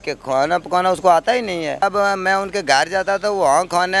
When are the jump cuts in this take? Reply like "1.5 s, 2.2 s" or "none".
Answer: 1.8 s